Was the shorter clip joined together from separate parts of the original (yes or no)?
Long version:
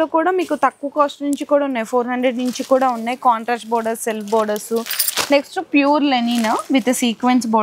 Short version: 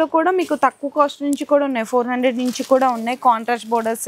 no